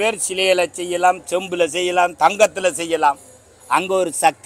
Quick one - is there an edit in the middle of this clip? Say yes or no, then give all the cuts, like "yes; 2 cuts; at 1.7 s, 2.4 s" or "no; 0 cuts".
no; 0 cuts